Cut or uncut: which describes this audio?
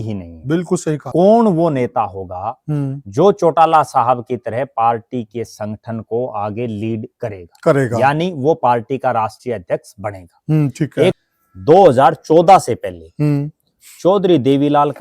cut